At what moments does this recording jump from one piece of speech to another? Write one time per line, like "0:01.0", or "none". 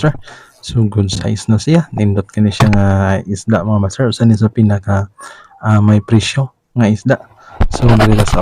none